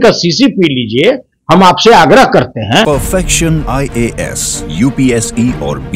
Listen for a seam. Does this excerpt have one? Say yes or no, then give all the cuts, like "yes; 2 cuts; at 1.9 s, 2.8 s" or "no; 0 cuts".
no; 0 cuts